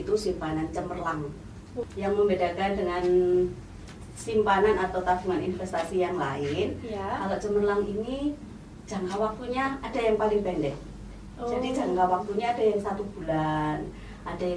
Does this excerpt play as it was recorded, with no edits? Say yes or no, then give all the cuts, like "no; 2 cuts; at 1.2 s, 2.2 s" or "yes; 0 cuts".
no; 1 cut; at 1.8 s